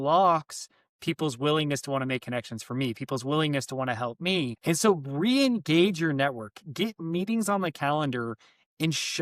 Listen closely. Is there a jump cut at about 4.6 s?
yes; 1 cut; at 4.6 s

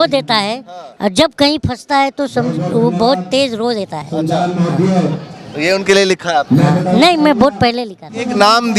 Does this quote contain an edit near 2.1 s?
no; 0 cuts

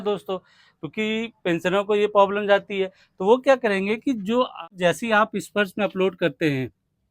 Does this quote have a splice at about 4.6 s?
yes; 1 cut; at 4.6 s

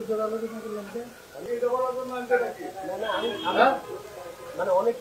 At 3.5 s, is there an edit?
no; 1 cut; at 1.5 s

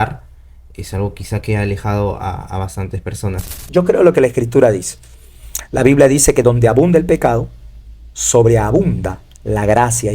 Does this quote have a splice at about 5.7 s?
no; 1 cut; at 3.6 s

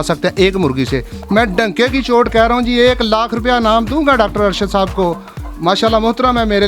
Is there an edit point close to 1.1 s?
yes; 1 cut; at 1.1 s

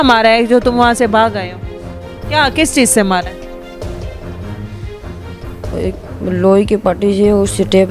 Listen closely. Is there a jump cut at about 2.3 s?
no; 2 cuts; at 3.8 s, 5.2 s

